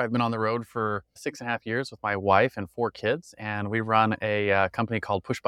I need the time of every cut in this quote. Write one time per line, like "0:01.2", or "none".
0:01.2